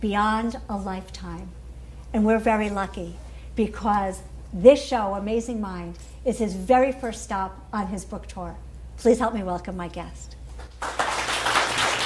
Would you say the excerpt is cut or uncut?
cut